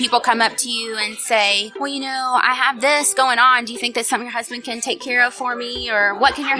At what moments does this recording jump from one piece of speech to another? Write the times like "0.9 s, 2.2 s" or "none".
none

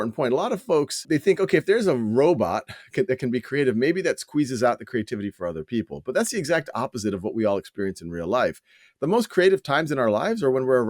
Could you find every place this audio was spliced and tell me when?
1.0 s

